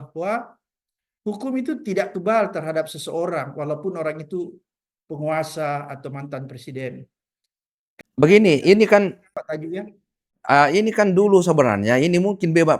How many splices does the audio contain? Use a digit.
0